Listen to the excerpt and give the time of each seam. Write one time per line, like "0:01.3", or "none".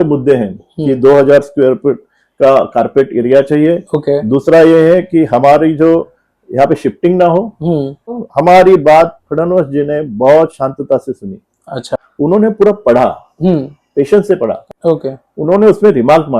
0:08.2
0:11.9
0:14.7